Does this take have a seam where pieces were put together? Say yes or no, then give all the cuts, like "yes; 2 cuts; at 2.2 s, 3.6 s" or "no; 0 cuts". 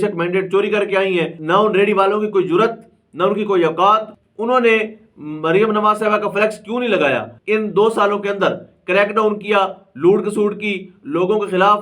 yes; 3 cuts; at 1.4 s, 4.2 s, 7.3 s